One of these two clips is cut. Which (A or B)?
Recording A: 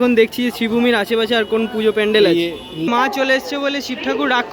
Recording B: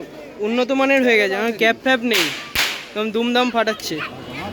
A